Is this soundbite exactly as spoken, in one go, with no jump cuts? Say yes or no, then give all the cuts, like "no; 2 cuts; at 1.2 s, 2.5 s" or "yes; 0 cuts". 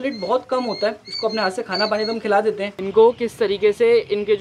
no; 1 cut; at 2.7 s